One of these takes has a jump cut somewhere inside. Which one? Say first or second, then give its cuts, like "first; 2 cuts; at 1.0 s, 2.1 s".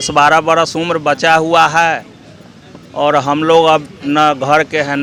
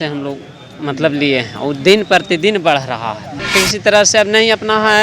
second; 1 cut; at 3.4 s